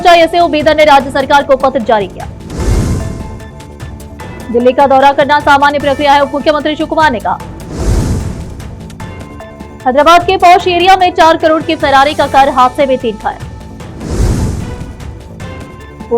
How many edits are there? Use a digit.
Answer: 0